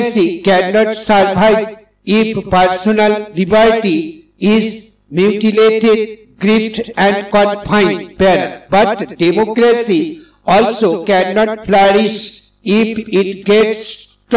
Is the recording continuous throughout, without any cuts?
yes; 0 cuts

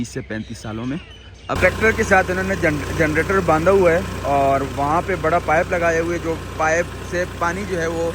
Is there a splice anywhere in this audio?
yes; 1 cut; at 1.6 s

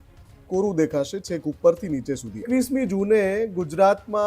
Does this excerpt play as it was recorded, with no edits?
no; 1 cut; at 2.4 s

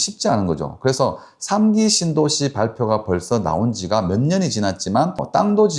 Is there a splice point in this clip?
no; 0 cuts

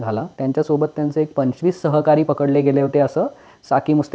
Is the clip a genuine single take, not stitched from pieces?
yes; 0 cuts

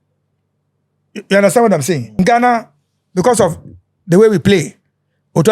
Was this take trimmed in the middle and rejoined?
yes; 1 cut; at 2.2 s

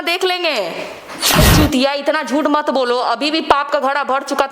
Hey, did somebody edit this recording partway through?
yes; 1 cut; at 1.4 s

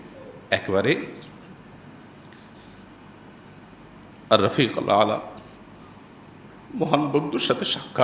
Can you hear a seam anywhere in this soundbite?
yes; 1 cut; at 1.8 s

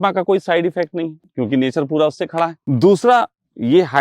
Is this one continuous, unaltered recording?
no; 2 cuts; at 1.2 s, 2.6 s

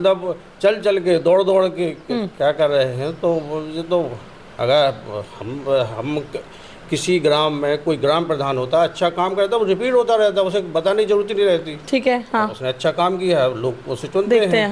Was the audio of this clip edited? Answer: no; 0 cuts

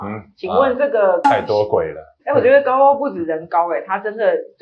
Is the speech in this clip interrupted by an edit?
yes; 2 cuts; at 1.2 s, 2.1 s

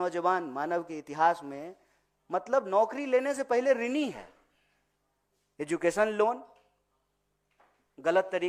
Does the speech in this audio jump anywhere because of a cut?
no; 0 cuts

